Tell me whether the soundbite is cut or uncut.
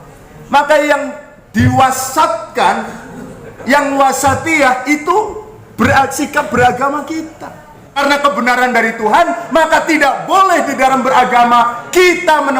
cut